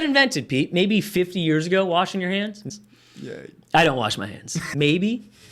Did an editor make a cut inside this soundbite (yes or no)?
yes